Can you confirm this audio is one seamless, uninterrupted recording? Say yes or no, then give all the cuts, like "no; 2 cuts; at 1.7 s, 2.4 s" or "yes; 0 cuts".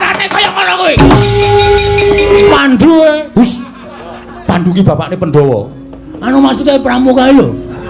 no; 1 cut; at 2.5 s